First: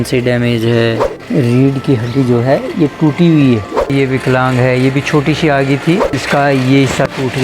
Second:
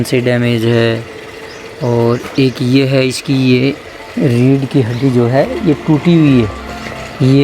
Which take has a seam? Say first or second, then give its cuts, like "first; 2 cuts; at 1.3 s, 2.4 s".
first; 3 cuts; at 1.1 s, 3.9 s, 6.1 s